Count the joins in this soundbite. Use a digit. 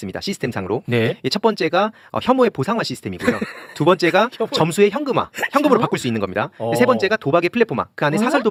0